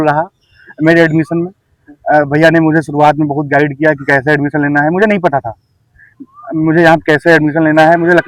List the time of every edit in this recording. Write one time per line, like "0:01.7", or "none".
none